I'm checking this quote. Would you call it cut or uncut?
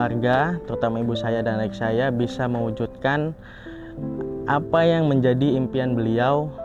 uncut